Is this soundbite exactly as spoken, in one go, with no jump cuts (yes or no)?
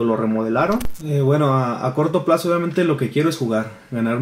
no